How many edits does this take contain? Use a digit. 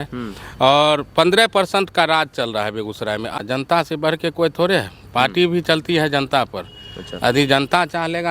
1